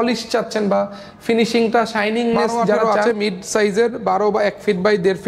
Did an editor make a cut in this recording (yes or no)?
yes